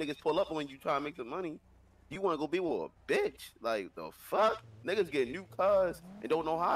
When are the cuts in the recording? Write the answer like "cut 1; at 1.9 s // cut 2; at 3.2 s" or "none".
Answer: none